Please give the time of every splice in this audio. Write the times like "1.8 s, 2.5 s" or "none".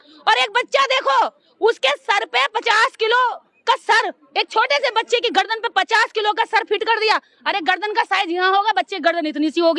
none